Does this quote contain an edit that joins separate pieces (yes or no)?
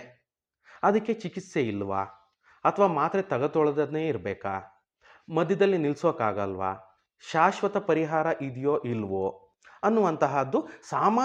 no